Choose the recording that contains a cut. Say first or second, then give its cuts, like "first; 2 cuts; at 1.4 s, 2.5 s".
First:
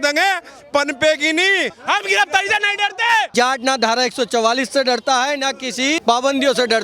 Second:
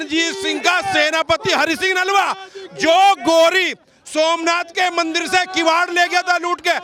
first; 3 cuts; at 1.7 s, 3.3 s, 6.0 s